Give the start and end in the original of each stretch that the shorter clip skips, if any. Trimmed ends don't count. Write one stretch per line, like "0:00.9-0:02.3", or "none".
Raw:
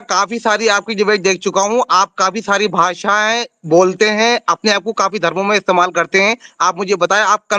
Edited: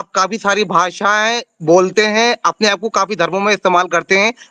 none